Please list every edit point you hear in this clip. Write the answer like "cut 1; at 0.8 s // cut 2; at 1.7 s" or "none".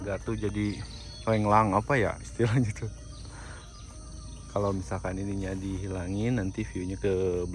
none